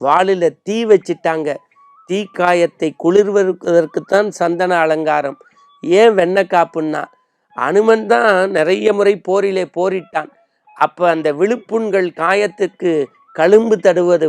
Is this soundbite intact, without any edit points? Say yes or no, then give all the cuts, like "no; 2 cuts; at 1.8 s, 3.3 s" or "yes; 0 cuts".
yes; 0 cuts